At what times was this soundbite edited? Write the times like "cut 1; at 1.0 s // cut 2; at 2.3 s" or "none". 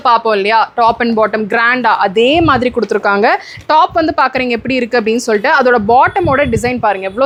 none

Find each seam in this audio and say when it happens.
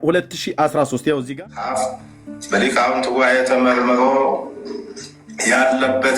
cut 1; at 1.4 s

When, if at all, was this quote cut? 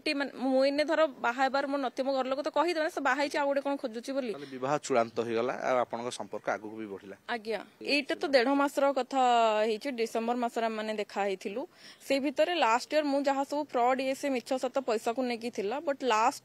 cut 1; at 7.7 s

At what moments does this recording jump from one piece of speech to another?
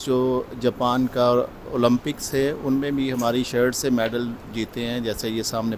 none

